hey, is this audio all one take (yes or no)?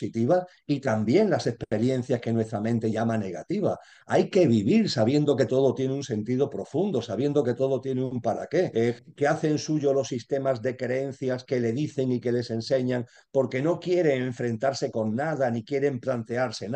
no